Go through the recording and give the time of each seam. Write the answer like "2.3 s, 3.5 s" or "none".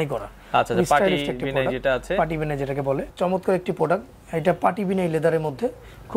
3.1 s